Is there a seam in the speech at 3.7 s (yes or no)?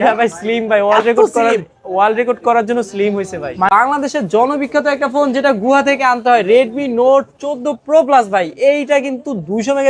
yes